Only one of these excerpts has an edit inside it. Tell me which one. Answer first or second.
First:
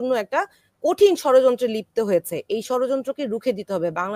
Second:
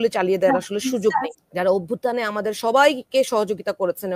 second